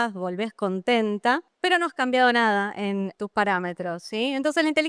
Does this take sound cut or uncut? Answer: uncut